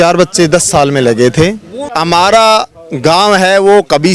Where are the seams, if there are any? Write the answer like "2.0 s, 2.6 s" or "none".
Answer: 1.9 s